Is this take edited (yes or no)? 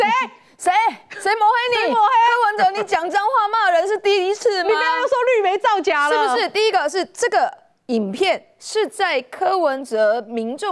no